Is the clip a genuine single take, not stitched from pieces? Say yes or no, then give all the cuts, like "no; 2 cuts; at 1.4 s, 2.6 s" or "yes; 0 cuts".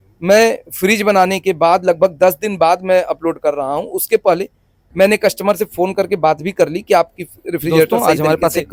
yes; 0 cuts